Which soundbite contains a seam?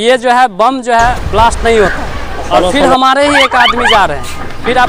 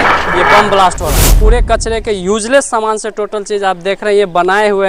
second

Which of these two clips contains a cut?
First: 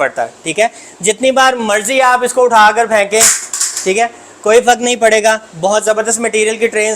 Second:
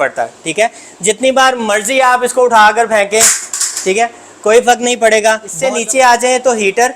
second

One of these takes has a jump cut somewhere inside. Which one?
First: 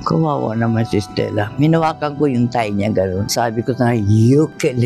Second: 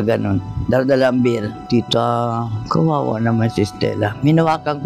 second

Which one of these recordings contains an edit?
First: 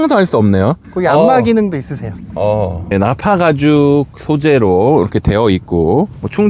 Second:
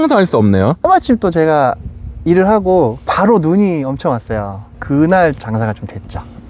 second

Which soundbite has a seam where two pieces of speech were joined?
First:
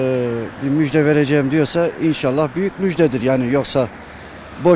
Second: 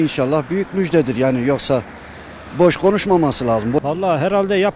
second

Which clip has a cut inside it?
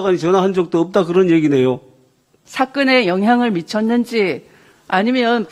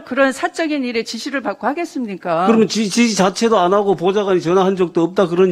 first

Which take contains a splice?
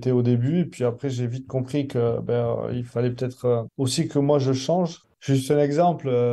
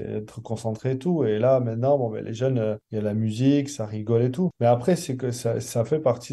first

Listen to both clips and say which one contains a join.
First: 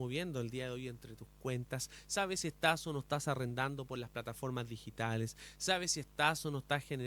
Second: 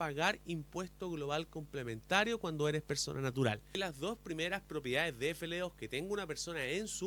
second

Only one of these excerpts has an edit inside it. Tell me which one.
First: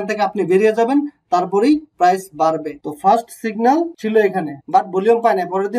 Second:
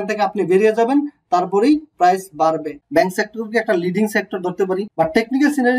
second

